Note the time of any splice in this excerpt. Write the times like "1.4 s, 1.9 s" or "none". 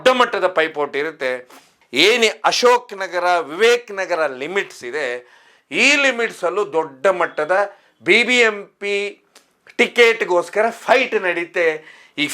1.7 s

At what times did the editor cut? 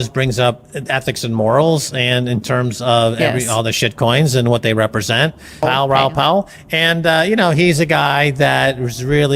5.6 s

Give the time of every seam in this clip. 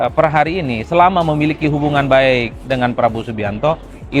none

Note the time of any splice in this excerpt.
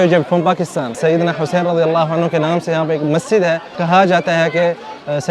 0.9 s, 3.8 s

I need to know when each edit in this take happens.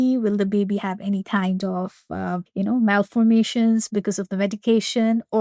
2.5 s

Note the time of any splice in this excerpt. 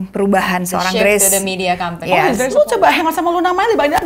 2.5 s

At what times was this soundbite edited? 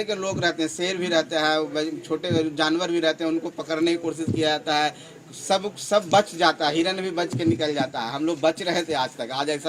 none

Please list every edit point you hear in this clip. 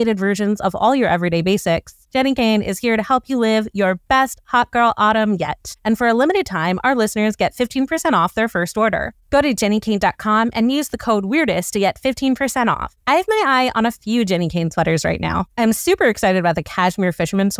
none

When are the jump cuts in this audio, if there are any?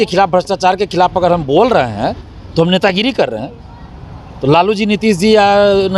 none

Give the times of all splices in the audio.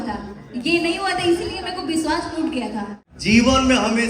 3.0 s

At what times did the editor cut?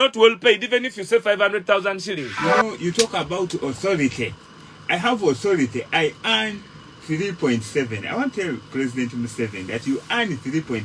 2.4 s

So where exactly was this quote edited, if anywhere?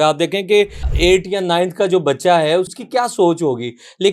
0.8 s, 2.7 s

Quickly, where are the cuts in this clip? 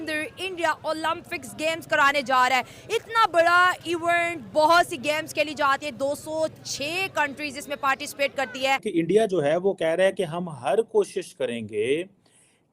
8.9 s

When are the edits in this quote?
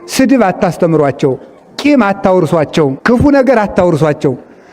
3.0 s

